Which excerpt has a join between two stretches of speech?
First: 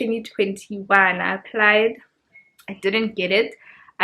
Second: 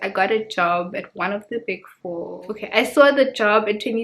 second; 1 cut; at 2.4 s

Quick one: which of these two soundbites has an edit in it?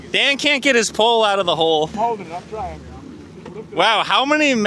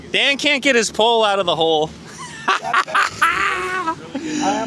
first; 1 cut; at 1.9 s

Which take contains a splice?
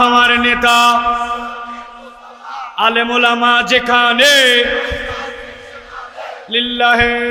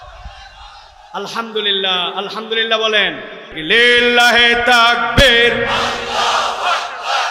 second; 1 cut; at 3.5 s

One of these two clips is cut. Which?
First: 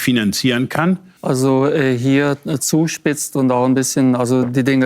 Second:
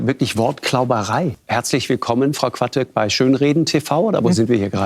first; 1 cut; at 1.1 s

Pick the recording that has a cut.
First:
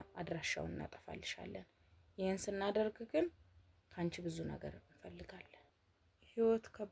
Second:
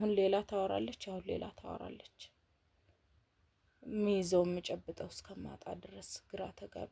first; 1 cut; at 5.7 s

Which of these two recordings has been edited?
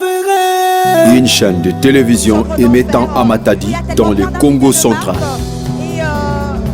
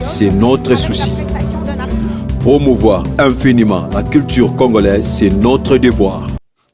first; 1 cut; at 1.0 s

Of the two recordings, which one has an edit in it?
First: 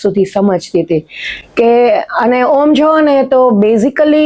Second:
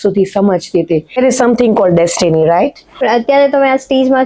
second; 2 cuts; at 1.2 s, 2.9 s

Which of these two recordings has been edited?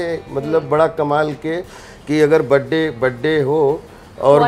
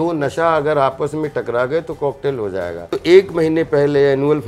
second; 1 cut; at 2.9 s

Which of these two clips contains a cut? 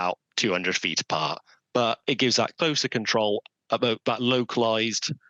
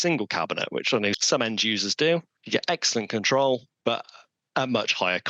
second; 3 cuts; at 1.2 s, 2.3 s, 3.7 s

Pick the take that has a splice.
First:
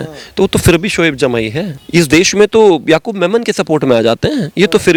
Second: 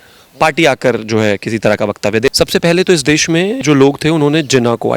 second; 2 cuts; at 2.3 s, 3.6 s

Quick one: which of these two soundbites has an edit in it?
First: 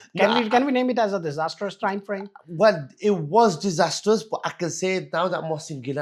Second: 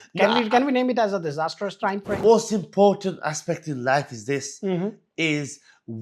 second; 1 cut; at 2.2 s

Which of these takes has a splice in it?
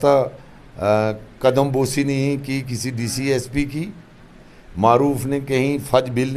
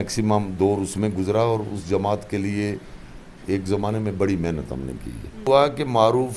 second; 1 cut; at 5.4 s

